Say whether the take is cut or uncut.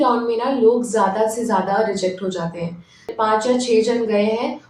cut